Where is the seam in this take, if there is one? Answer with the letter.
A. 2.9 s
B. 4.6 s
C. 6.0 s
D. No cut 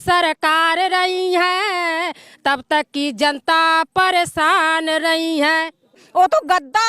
C